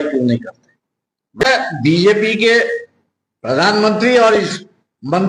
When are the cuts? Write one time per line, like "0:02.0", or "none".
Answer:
0:01.4